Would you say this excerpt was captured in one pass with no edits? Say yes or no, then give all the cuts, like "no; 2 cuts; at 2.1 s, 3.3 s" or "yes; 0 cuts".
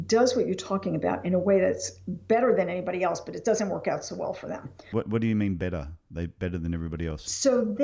no; 2 cuts; at 5.1 s, 6.7 s